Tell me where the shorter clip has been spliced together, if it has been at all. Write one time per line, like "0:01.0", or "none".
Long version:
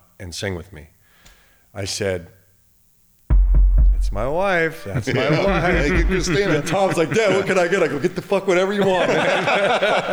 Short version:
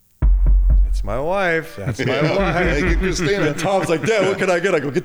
none